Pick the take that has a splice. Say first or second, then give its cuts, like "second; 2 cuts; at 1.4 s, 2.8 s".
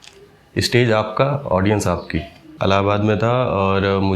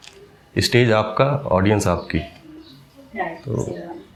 first; 1 cut; at 2.5 s